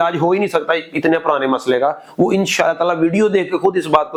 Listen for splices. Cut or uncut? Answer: uncut